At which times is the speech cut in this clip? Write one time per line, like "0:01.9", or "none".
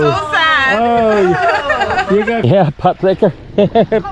0:02.4